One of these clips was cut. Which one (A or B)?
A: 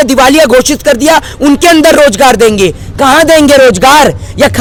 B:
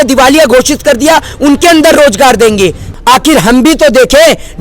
B